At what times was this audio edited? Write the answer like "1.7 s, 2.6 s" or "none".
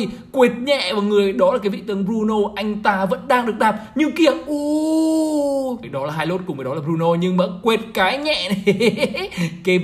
5.8 s